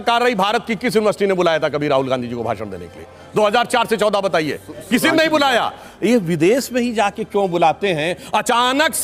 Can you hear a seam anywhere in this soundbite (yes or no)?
no